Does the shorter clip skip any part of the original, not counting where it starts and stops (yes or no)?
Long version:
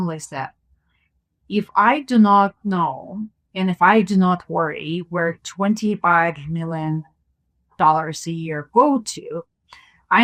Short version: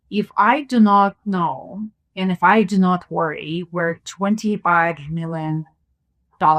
no